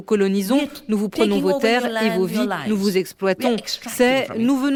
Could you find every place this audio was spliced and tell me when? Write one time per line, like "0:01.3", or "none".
none